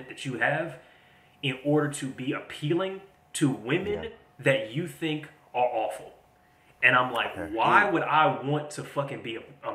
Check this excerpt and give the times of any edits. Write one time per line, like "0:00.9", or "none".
none